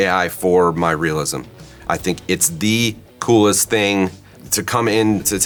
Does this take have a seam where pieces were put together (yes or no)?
no